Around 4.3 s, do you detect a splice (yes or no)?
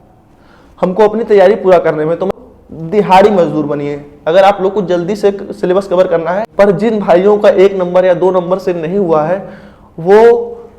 no